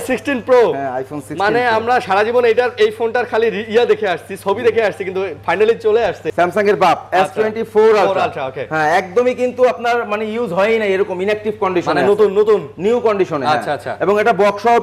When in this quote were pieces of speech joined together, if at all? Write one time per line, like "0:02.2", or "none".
0:06.2